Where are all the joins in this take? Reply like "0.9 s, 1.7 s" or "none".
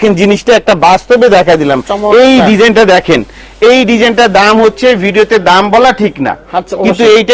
none